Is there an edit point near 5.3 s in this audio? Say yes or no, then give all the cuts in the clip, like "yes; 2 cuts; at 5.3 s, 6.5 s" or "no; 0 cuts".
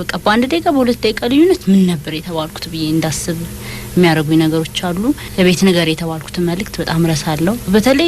yes; 1 cut; at 5.3 s